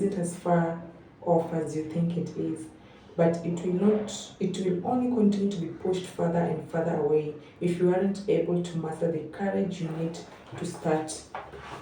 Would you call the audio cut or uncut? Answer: uncut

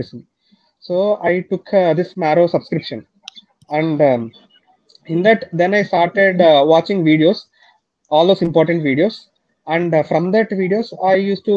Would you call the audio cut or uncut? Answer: uncut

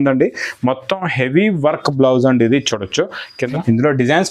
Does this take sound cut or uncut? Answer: cut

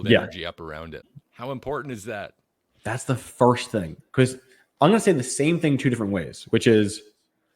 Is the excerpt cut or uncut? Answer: cut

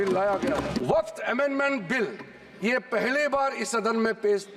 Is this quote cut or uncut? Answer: cut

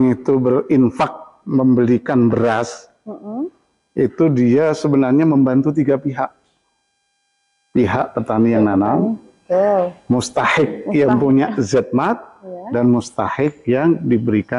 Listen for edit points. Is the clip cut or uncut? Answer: uncut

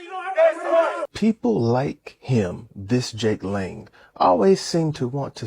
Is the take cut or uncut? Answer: cut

